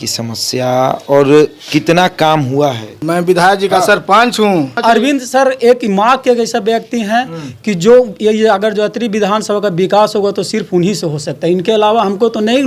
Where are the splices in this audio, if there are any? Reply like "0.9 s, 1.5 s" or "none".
3.0 s, 4.8 s